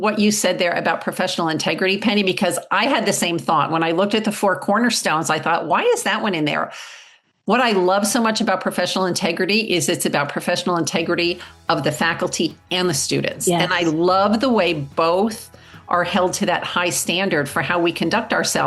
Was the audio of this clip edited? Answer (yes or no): no